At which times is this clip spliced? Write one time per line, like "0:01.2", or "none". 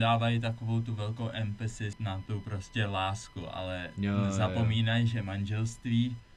0:02.0